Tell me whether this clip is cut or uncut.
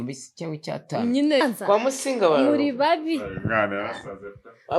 cut